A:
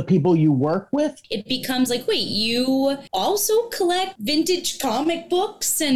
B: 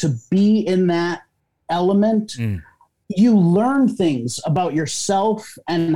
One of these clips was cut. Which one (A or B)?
A